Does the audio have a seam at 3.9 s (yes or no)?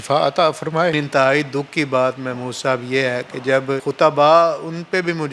yes